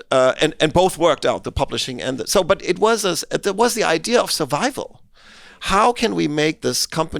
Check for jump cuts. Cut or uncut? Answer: uncut